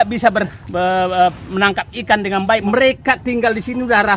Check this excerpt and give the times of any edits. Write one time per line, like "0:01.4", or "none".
0:02.6

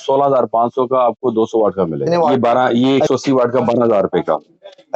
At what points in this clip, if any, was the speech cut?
0:02.1

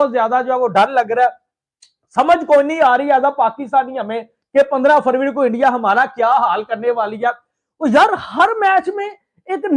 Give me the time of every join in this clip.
none

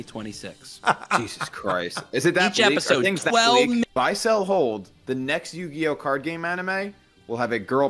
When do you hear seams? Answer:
0:03.8

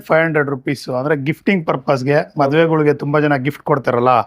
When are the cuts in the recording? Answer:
none

